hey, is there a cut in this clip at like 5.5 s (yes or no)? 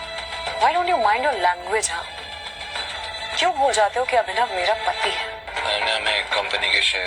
yes